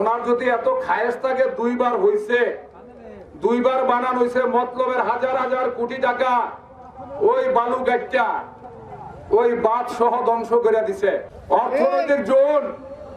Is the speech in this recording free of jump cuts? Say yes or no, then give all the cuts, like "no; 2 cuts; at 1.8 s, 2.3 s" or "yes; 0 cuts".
no; 1 cut; at 11.3 s